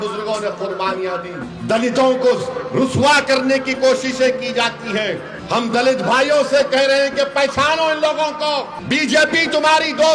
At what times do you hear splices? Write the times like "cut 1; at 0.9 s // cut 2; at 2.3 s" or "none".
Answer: cut 1; at 1.5 s // cut 2; at 5.3 s // cut 3; at 8.8 s